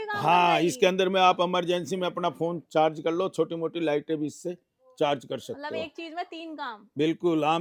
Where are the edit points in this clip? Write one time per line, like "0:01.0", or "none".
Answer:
none